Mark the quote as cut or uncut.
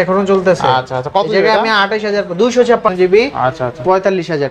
cut